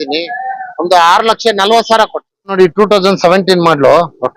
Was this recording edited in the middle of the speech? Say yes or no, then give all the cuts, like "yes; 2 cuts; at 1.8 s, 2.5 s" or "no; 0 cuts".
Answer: yes; 1 cut; at 2.5 s